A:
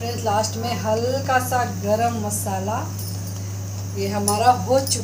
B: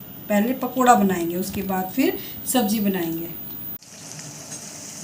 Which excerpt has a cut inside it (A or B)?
B